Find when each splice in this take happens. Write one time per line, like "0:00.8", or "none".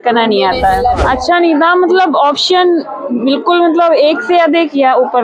0:01.0